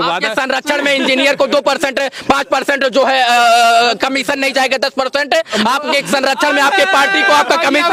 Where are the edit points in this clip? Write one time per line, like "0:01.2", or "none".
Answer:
none